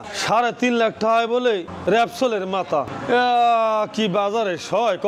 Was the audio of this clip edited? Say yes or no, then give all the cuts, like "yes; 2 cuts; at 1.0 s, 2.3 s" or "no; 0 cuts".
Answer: no; 0 cuts